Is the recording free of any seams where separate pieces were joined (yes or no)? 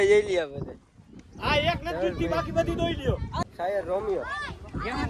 no